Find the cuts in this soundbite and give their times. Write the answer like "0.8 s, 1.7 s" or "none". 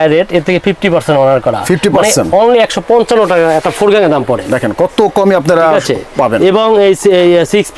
none